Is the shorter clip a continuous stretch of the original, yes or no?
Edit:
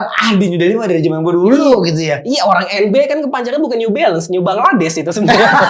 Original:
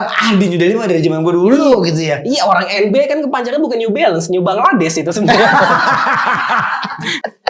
yes